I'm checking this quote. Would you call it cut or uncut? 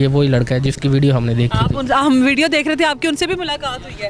uncut